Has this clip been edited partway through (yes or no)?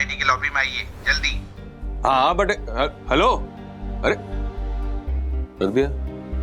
no